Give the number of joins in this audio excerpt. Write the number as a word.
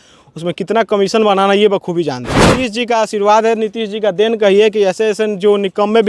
one